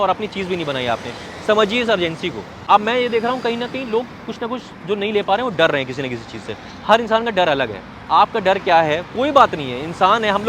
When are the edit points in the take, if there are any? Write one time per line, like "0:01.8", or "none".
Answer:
0:02.5